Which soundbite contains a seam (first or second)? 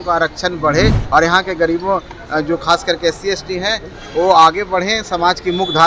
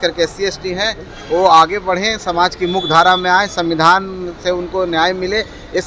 first